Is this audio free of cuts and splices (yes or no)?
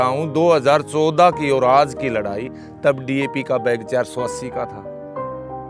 yes